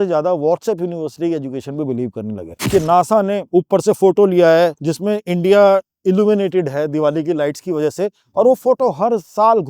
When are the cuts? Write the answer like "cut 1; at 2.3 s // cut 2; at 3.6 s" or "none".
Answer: cut 1; at 2.5 s // cut 2; at 3.4 s // cut 3; at 4.9 s